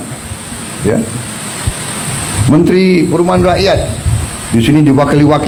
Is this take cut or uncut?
uncut